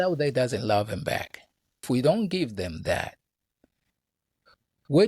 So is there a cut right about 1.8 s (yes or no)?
yes